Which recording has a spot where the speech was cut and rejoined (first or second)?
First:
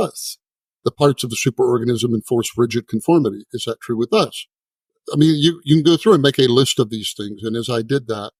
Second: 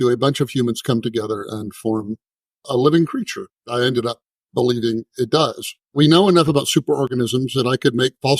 second